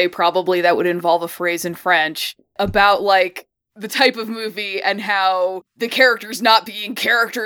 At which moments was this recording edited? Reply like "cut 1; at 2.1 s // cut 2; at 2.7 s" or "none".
cut 1; at 2.5 s // cut 2; at 5.7 s